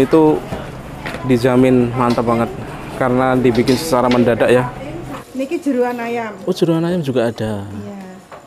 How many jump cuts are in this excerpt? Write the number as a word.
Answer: one